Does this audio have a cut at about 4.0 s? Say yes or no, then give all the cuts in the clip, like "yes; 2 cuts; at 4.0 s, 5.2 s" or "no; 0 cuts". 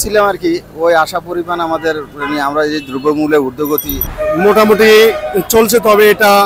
yes; 1 cut; at 4.0 s